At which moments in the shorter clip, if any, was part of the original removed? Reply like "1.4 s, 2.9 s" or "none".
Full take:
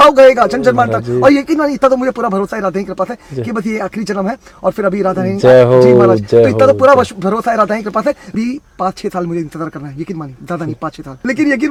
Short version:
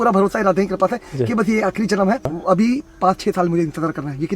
2.4 s